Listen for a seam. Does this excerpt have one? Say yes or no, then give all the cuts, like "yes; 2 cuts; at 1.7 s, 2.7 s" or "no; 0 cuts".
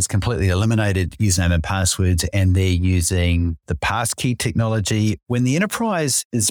no; 0 cuts